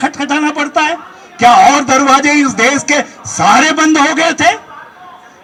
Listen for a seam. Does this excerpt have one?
no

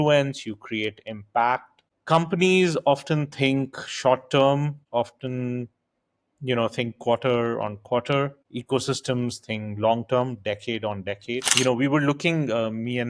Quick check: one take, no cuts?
no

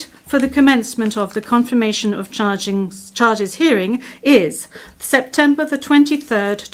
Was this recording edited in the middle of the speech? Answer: no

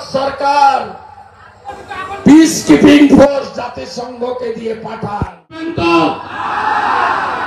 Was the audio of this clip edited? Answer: yes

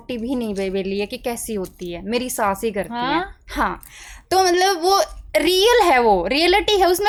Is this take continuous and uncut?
yes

